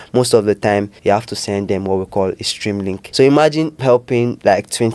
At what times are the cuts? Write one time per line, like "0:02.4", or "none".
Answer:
0:00.9
0:03.1
0:04.1